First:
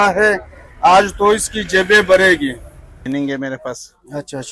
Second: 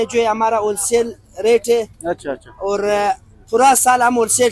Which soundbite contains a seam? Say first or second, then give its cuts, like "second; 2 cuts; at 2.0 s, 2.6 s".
first; 1 cut; at 2.9 s